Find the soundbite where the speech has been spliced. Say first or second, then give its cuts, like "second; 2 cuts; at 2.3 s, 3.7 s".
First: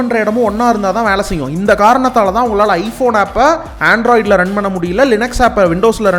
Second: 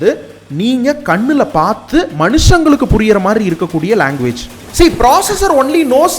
second; 1 cut; at 4.6 s